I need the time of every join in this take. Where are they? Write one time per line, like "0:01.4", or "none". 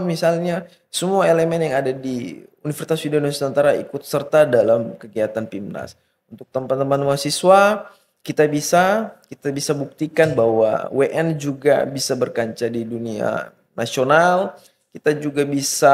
none

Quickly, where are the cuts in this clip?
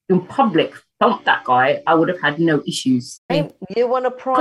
0:03.3

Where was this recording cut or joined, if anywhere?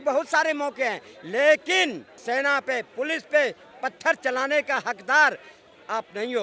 0:02.1

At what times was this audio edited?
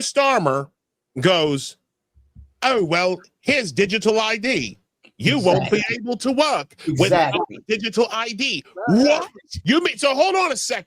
0:09.5

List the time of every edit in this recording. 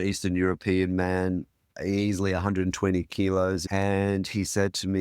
0:03.6

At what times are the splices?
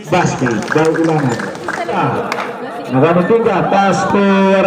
0:01.9

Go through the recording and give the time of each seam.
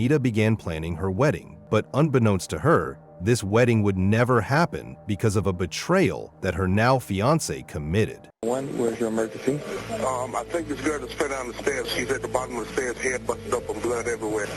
0:01.5
0:08.3

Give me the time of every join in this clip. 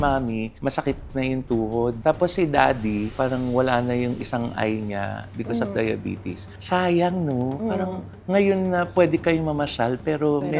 0:02.0
0:06.5

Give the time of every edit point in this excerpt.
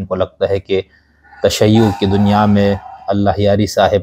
none

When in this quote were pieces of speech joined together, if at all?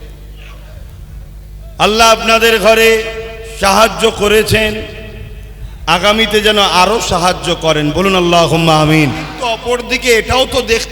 0:09.4

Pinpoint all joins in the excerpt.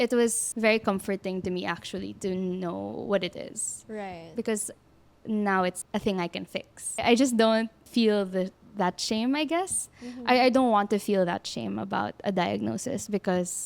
0:07.0

